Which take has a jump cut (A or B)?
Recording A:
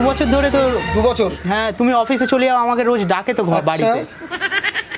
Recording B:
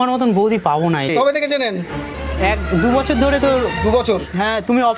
B